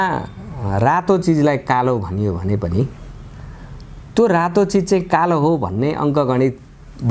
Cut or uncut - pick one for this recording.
uncut